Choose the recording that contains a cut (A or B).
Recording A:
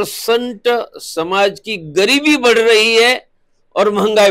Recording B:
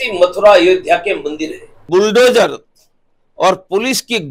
B